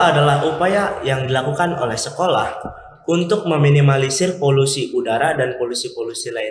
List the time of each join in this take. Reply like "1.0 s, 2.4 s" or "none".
none